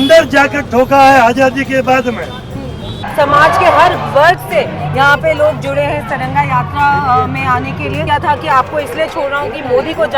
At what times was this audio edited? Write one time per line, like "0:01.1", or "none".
0:03.0
0:08.0